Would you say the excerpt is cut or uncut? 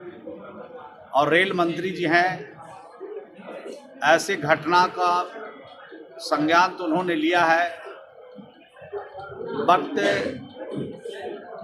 uncut